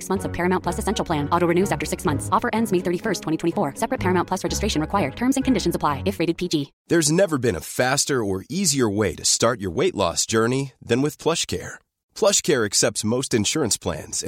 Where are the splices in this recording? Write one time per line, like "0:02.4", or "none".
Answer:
0:06.7